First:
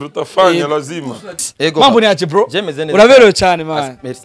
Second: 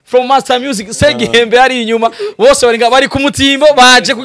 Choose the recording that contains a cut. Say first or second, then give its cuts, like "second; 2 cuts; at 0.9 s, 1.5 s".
first; 1 cut; at 1.5 s